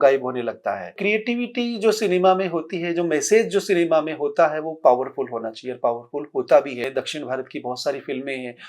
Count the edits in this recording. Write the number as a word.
two